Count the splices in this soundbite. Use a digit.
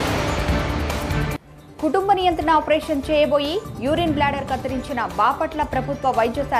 1